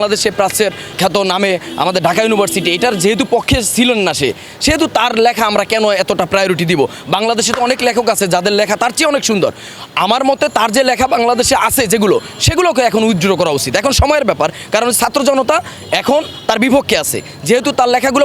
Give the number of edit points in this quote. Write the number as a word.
one